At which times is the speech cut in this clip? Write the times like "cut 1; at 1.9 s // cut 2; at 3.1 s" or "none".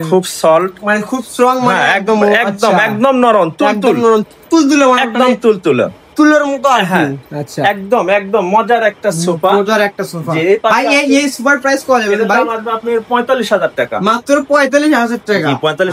none